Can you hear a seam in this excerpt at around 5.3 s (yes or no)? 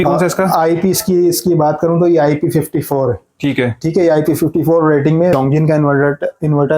yes